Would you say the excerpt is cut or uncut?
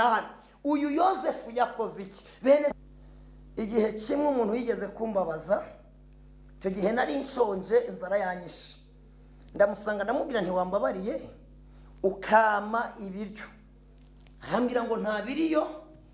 cut